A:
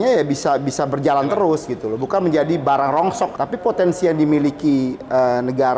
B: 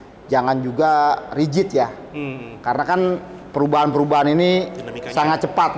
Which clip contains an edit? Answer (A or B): A